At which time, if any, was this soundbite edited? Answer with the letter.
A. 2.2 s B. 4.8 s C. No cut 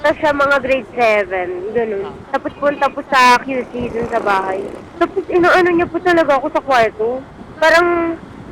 A